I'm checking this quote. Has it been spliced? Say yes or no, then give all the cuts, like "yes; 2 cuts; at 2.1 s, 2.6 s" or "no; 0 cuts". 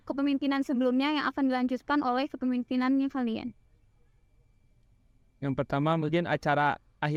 no; 0 cuts